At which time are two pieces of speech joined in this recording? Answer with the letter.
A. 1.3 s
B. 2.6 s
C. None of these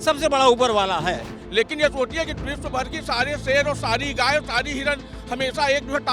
A